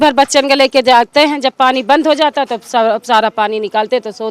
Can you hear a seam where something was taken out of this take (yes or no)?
no